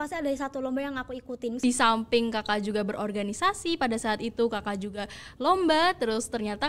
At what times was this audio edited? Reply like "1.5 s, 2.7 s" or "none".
1.6 s